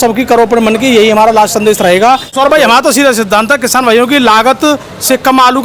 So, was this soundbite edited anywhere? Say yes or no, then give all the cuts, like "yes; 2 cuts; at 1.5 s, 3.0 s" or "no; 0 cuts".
yes; 1 cut; at 2.4 s